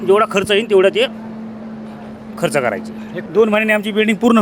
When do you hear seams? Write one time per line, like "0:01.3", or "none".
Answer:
0:03.1